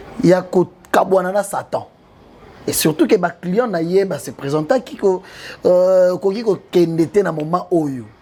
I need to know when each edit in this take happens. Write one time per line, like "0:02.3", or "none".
none